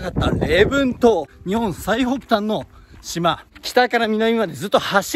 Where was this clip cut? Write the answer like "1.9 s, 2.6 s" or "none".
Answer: 1.3 s, 3.5 s

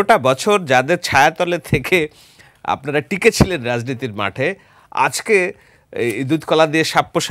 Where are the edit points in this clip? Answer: none

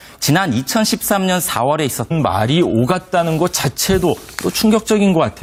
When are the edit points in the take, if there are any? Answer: none

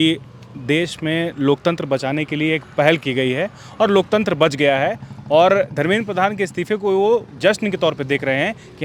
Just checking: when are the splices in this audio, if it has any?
none

